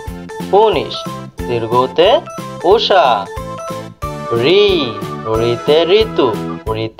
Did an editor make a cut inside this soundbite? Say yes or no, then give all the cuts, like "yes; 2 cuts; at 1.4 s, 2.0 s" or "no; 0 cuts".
no; 0 cuts